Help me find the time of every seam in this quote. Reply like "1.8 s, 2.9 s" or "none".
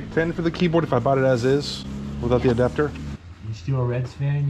3.2 s

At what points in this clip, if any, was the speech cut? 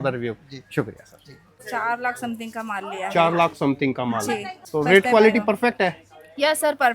1.5 s, 4.6 s

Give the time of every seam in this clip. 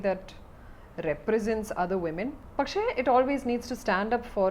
2.4 s

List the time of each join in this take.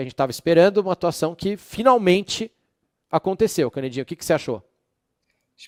none

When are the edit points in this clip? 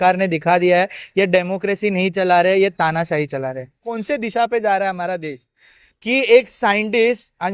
3.9 s

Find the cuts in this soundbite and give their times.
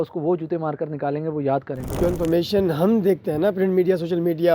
2.0 s

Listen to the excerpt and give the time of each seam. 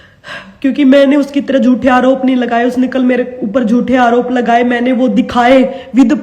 none

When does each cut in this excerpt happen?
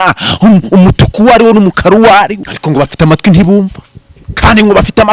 2.5 s

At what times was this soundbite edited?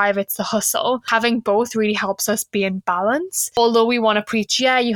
1.1 s, 3.6 s

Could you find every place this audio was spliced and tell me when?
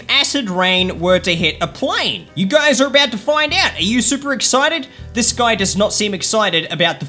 none

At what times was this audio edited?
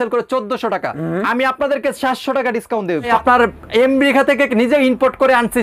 3.1 s

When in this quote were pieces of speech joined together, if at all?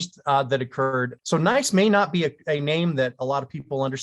1.1 s

